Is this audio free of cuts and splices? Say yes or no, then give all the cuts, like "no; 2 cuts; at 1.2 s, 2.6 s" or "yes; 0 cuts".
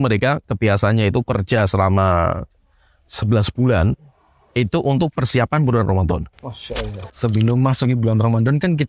no; 1 cut; at 7.1 s